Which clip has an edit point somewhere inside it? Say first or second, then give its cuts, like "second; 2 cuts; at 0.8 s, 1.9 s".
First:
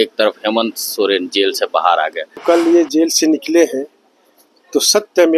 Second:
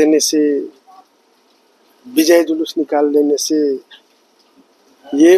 first; 1 cut; at 2.4 s